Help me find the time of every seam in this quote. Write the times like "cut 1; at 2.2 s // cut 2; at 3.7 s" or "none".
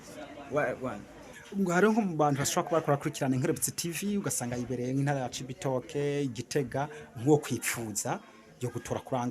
cut 1; at 1.3 s